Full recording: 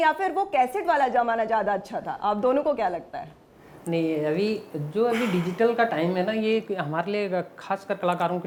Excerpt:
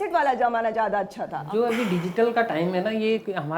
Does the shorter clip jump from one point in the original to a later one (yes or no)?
yes